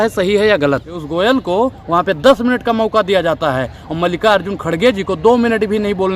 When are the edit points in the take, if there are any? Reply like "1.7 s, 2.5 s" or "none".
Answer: 1.0 s